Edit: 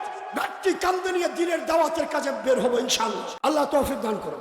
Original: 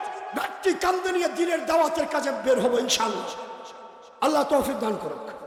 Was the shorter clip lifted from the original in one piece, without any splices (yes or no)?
no